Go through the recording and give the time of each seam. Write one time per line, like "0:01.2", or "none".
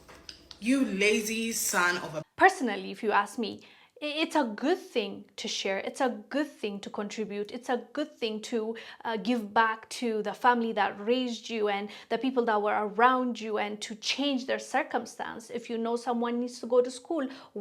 0:02.2